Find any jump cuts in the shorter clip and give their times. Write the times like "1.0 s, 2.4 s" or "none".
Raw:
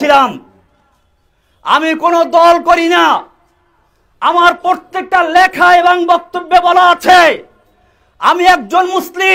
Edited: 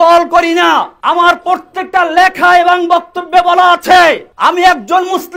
0.9 s, 4.3 s